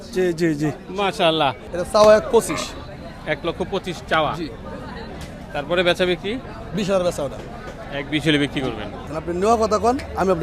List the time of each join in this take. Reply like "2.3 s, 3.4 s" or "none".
1.7 s, 9.0 s

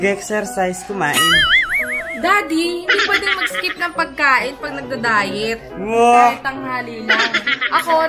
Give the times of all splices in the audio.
none

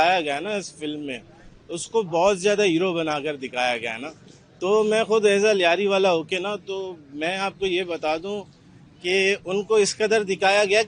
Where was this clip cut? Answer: none

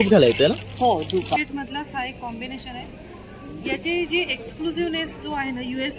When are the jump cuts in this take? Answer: 1.4 s

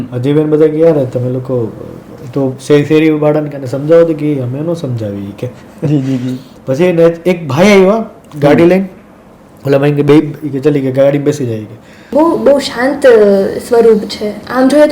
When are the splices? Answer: 12.1 s

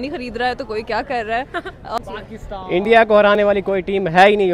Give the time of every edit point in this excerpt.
2.0 s

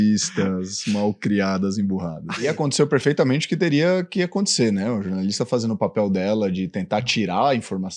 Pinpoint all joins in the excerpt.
2.5 s

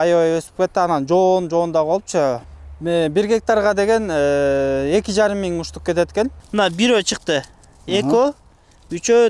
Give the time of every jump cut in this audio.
2.5 s, 6.4 s

